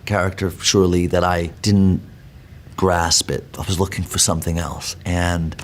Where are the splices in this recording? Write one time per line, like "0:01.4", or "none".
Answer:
0:01.5
0:03.5

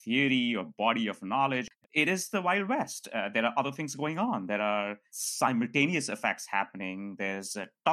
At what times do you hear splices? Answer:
0:01.7

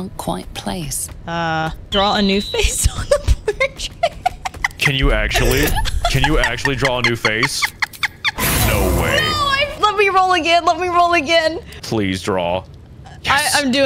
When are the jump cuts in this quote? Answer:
0:01.9
0:08.4
0:09.7
0:11.7

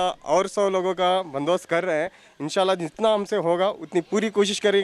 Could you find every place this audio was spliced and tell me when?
none

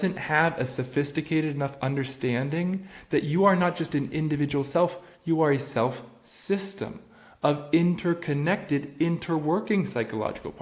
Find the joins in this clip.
none

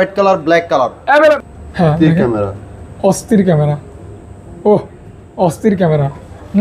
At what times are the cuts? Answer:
0:01.2

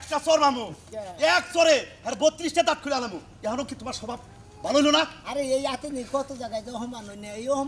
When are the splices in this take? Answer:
none

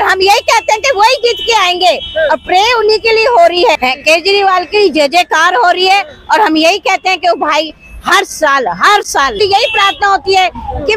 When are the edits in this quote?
0:03.8
0:09.4

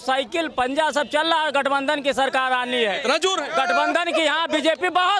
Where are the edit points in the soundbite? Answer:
none

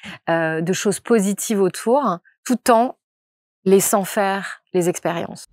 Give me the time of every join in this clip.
0:02.3

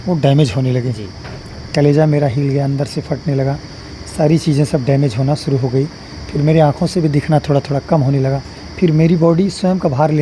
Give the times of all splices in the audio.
none

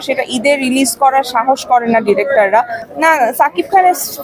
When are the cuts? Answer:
0:02.8

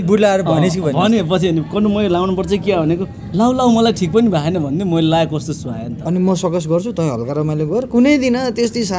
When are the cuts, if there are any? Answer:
0:05.9

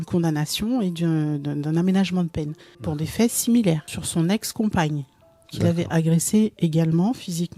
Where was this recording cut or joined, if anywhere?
0:02.9
0:04.0

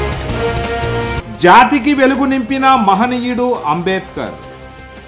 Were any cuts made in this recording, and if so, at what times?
0:00.9

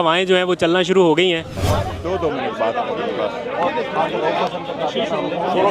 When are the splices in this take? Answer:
0:01.5

